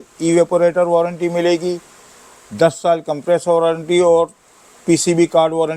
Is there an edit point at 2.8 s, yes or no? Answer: no